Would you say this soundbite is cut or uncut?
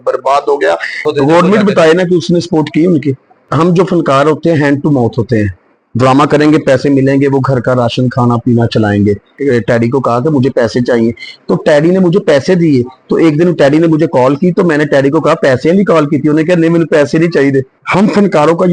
cut